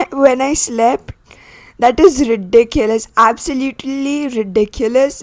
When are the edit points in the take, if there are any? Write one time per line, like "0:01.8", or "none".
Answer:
none